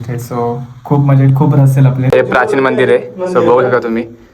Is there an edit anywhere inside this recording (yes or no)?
yes